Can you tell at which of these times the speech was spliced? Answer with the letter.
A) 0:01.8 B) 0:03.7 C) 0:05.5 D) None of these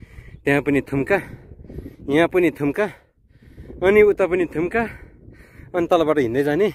D